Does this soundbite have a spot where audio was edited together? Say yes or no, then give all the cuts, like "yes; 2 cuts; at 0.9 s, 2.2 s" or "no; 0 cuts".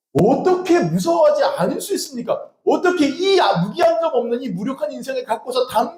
no; 0 cuts